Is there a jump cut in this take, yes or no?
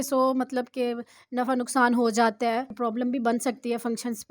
yes